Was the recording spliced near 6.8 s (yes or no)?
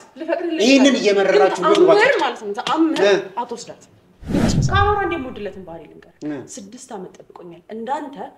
no